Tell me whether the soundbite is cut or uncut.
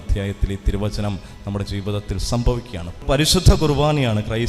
cut